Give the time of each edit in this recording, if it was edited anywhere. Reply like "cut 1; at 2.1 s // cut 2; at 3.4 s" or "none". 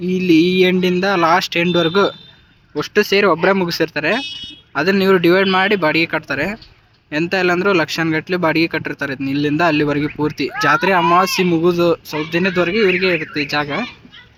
none